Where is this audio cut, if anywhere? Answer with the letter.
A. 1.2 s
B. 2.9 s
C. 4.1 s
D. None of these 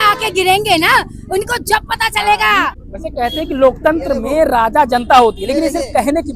B